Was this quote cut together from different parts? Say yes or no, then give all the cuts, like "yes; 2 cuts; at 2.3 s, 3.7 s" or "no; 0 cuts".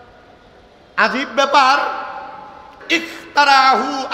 yes; 1 cut; at 2.8 s